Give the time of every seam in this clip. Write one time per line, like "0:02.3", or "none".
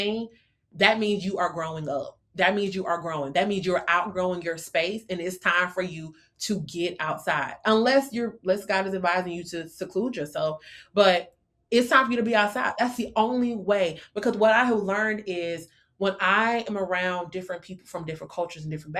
none